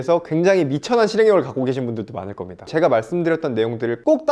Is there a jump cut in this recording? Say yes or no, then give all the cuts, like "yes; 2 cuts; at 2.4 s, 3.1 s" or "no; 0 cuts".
yes; 1 cut; at 2.7 s